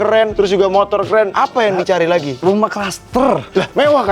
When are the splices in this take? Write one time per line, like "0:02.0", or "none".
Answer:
none